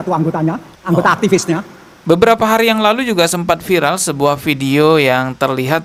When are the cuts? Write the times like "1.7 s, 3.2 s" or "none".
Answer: 2.0 s